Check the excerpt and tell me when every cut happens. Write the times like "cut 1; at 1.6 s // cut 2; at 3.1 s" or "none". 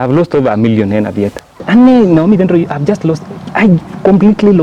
cut 1; at 1.6 s